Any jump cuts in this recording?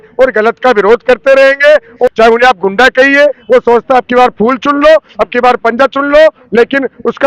yes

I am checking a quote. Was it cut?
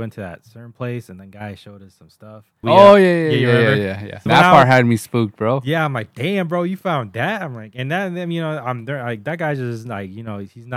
yes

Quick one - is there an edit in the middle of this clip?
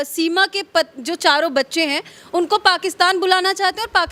no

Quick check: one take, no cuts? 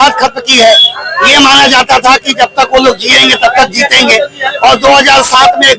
yes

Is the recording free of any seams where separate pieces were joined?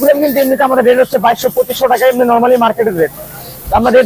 yes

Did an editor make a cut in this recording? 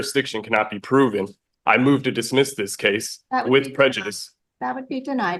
no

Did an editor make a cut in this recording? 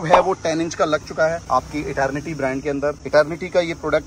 no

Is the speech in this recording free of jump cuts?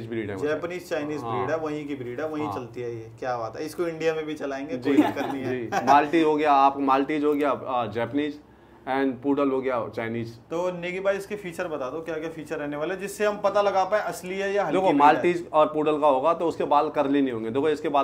yes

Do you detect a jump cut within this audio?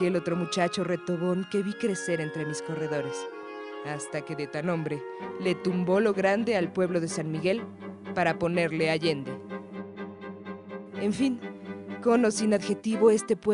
no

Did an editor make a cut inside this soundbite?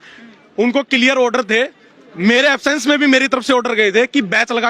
no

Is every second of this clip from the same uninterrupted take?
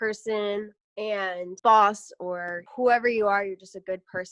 no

